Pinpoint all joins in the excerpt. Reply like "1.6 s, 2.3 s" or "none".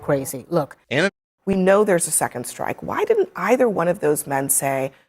1.1 s

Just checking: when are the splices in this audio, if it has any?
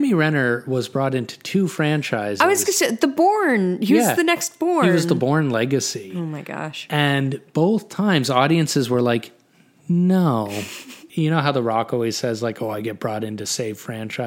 11.0 s

